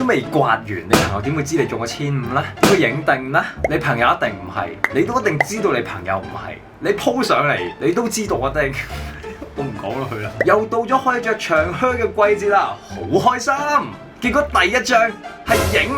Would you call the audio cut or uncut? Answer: uncut